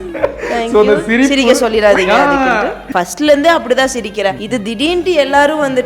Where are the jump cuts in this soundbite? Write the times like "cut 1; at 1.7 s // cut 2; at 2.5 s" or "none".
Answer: cut 1; at 2.8 s // cut 2; at 4.4 s

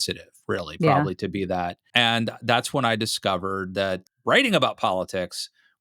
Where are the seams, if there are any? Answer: cut 1; at 1.8 s // cut 2; at 4.1 s

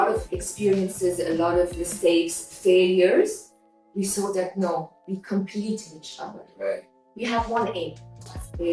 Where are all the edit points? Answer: cut 1; at 7.1 s

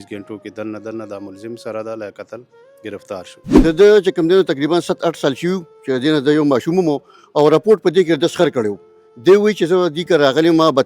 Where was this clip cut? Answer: cut 1; at 3.4 s

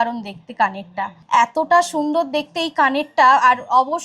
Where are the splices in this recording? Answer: cut 1; at 1.2 s

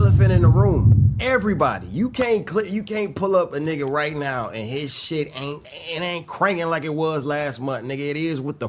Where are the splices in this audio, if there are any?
cut 1; at 1.1 s // cut 2; at 5.7 s

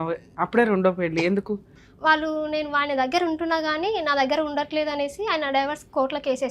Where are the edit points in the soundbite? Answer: cut 1; at 1.7 s

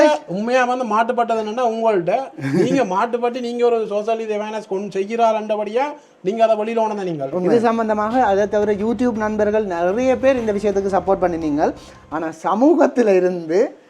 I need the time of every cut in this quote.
cut 1; at 7.3 s

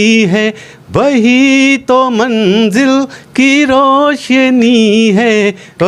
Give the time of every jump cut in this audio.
none

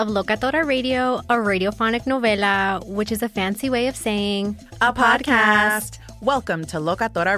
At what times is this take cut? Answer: none

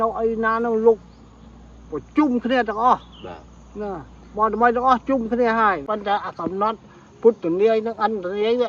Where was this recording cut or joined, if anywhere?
cut 1; at 5.8 s

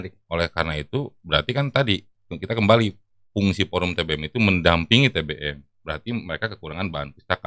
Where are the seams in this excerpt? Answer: none

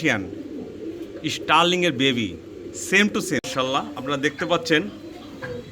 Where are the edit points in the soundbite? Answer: cut 1; at 3.4 s

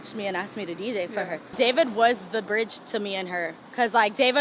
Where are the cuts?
cut 1; at 1.5 s

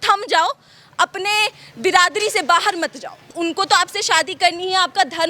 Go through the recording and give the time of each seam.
cut 1; at 3.3 s

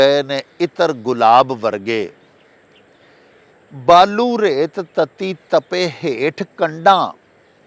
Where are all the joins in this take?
none

